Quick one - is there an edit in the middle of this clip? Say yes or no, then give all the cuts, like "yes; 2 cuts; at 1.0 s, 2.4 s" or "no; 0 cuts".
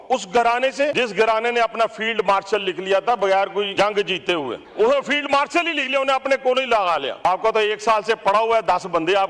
yes; 4 cuts; at 0.9 s, 3.7 s, 4.6 s, 7.2 s